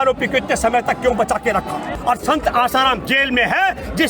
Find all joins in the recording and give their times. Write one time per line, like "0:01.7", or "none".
0:01.9